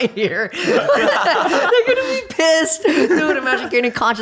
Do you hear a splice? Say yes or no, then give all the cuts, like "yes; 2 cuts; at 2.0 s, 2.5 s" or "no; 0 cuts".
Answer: yes; 1 cut; at 1.7 s